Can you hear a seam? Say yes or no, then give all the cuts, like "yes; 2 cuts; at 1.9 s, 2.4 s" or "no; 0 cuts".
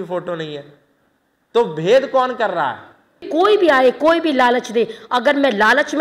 yes; 1 cut; at 3.3 s